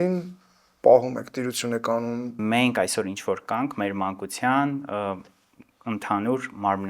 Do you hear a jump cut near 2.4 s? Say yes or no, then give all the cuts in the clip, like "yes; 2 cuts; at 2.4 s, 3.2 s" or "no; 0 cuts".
yes; 1 cut; at 2.4 s